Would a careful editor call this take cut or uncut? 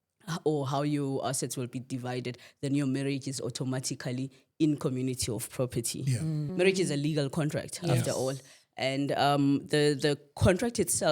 cut